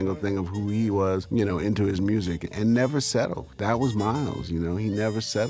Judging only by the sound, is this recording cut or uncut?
cut